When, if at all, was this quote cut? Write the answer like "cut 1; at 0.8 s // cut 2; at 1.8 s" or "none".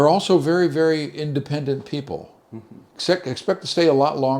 cut 1; at 2.8 s